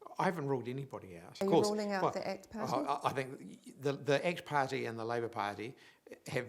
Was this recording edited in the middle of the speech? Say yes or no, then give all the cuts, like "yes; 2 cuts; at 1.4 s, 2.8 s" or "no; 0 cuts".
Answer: yes; 1 cut; at 1.4 s